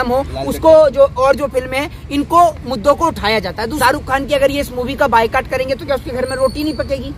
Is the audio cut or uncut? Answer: cut